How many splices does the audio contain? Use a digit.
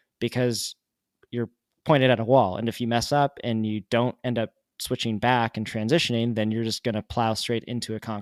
0